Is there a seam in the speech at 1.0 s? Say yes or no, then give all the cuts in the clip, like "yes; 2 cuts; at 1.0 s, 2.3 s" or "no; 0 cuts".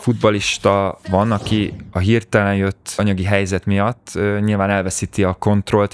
yes; 1 cut; at 1.0 s